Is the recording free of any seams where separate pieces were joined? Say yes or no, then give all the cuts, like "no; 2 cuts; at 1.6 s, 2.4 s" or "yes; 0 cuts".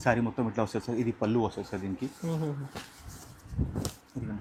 yes; 0 cuts